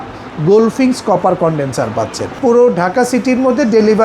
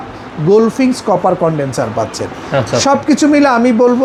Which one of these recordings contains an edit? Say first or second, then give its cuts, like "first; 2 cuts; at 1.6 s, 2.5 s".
first; 1 cut; at 2.4 s